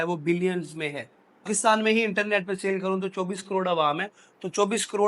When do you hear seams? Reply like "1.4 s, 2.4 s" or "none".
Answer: 1.5 s